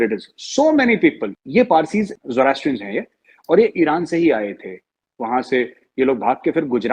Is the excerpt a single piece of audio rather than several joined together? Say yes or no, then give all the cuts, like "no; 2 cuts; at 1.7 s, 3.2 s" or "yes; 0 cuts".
no; 1 cut; at 1.3 s